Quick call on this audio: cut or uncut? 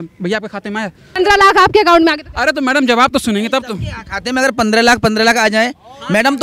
cut